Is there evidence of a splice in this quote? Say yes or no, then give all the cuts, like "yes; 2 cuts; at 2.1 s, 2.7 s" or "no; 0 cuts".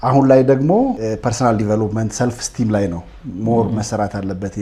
yes; 1 cut; at 1.0 s